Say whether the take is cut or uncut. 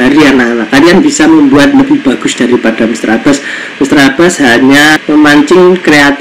cut